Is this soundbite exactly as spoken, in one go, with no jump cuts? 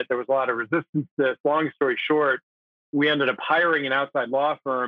yes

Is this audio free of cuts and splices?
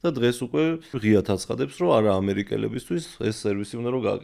no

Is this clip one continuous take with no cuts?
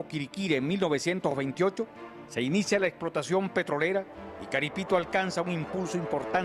no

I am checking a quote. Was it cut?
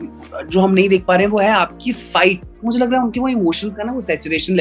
yes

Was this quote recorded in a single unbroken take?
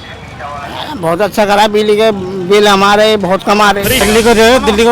no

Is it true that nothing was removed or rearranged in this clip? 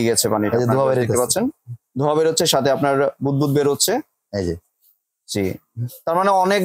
yes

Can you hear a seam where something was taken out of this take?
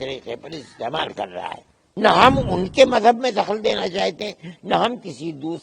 yes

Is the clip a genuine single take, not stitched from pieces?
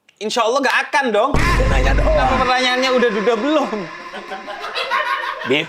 yes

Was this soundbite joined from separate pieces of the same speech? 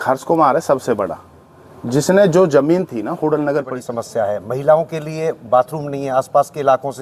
yes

